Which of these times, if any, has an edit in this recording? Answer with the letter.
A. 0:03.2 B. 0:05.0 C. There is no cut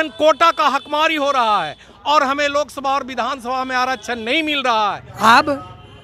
B